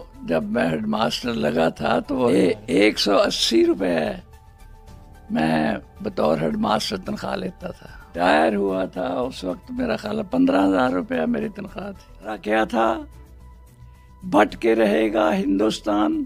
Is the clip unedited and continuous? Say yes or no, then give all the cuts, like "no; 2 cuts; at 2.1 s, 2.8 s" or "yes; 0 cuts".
no; 3 cuts; at 2.3 s, 8.1 s, 12.4 s